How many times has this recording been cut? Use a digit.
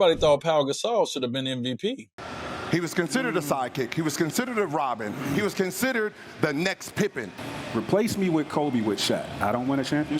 2